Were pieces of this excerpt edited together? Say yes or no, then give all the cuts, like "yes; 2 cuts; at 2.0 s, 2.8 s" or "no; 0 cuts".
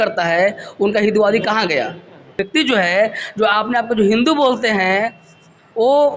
yes; 1 cut; at 2.4 s